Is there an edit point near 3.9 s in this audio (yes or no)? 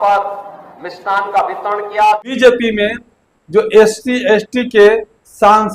no